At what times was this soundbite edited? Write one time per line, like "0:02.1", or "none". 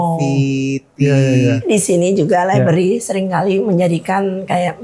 0:01.6